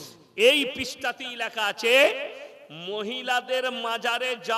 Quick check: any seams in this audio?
no; 0 cuts

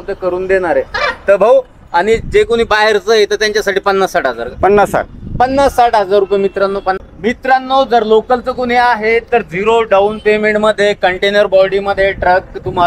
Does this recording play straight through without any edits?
no; 1 cut; at 7.0 s

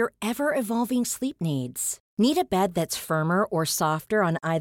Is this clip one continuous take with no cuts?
yes; 0 cuts

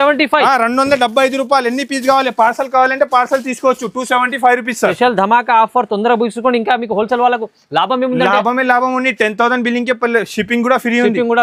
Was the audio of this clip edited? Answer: no; 0 cuts

